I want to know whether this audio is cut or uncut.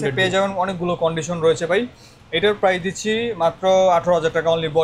uncut